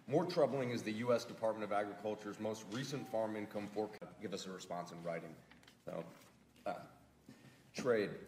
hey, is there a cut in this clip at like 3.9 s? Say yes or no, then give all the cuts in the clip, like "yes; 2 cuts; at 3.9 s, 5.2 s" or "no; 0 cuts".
no; 0 cuts